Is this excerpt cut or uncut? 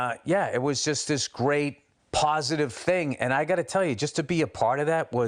cut